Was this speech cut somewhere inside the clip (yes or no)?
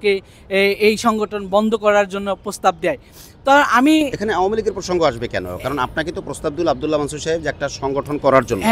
no